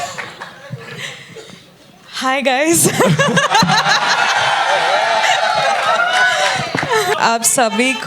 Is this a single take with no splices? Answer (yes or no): no